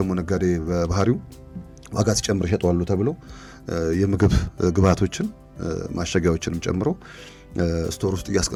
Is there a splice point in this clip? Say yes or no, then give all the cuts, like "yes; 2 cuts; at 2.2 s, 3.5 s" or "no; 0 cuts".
no; 0 cuts